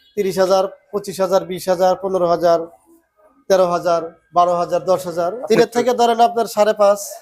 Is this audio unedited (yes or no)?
no